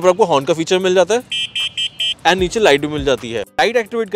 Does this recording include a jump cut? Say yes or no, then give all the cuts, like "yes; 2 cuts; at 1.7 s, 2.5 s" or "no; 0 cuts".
no; 0 cuts